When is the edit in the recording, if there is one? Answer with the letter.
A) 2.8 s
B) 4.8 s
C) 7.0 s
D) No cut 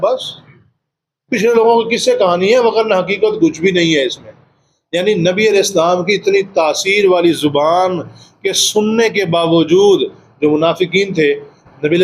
D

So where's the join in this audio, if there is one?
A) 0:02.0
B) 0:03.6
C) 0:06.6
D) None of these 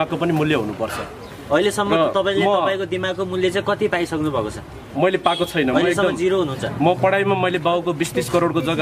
D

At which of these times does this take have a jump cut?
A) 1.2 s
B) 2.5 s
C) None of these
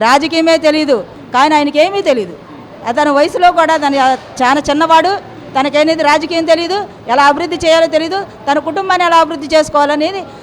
A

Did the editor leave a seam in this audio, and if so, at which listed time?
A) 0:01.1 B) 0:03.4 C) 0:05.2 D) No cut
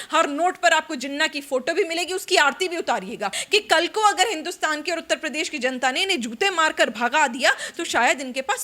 B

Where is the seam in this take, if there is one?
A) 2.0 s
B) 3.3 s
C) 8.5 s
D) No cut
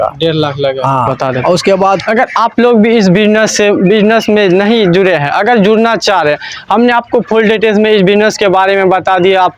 A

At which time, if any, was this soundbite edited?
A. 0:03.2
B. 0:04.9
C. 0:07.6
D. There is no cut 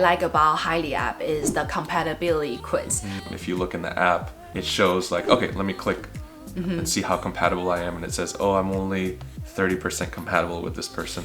A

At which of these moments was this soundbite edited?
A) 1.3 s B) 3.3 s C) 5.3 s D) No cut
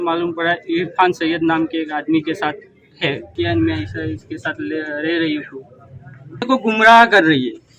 B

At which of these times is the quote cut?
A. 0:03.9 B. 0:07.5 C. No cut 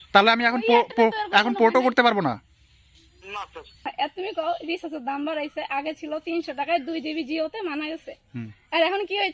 A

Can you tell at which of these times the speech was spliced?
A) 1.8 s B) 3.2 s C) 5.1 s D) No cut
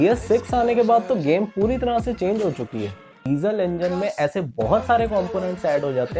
B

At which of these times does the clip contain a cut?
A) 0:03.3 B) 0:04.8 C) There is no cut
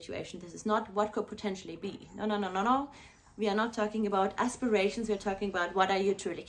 C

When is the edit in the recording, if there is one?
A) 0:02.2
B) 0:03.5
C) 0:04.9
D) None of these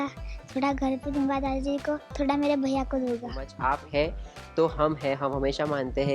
B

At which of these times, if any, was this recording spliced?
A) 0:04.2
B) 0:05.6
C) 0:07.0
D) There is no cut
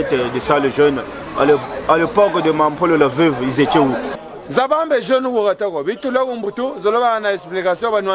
A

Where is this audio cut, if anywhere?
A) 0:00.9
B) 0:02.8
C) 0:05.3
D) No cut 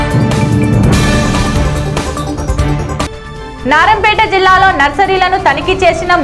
B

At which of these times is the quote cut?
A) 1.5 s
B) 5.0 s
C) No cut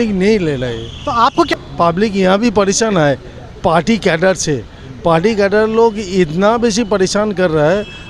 A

